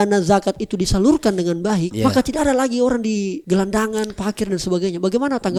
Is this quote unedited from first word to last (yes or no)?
yes